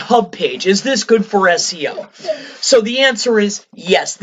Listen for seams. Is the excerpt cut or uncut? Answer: uncut